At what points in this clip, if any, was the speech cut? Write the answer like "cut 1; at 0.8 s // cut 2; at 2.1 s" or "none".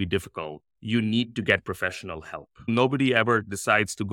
cut 1; at 2.7 s